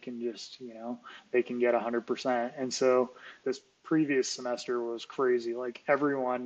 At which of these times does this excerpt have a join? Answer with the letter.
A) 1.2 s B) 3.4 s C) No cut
B